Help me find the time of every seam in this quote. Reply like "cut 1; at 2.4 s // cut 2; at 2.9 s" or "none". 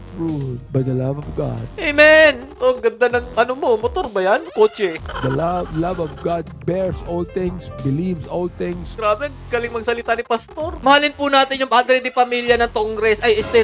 cut 1; at 2.5 s // cut 2; at 5.1 s // cut 3; at 8.9 s // cut 4; at 10.8 s